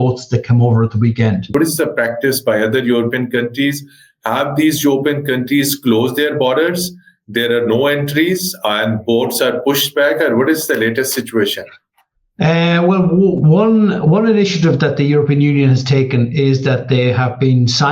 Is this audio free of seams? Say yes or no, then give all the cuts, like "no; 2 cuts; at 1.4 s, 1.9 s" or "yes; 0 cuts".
no; 1 cut; at 1.5 s